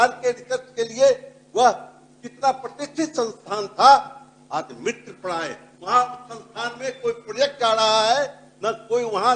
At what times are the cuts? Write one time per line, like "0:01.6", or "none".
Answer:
0:05.7